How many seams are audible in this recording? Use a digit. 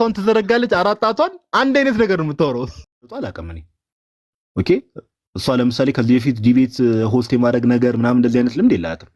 1